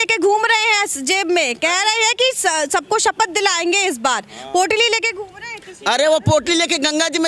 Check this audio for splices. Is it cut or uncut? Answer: uncut